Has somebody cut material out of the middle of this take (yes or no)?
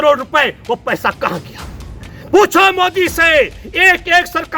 no